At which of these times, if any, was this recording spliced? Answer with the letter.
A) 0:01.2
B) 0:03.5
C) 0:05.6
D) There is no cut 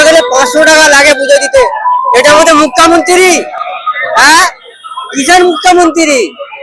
D